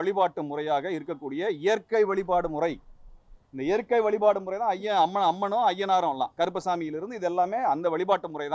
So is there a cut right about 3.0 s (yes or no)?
no